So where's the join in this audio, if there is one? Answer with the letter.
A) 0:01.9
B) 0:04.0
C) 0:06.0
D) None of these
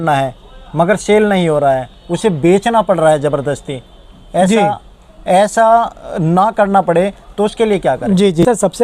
D